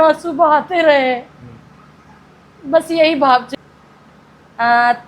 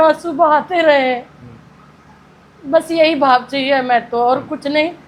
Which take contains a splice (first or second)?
first